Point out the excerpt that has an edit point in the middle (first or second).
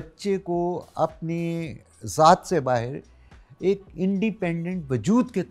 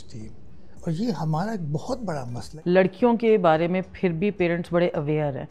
second